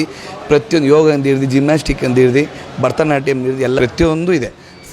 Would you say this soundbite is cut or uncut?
cut